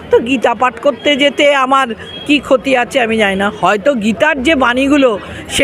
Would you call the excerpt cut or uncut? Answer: uncut